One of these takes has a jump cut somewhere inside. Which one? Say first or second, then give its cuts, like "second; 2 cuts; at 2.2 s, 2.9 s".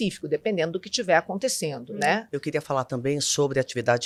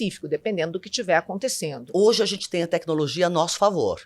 second; 1 cut; at 1.8 s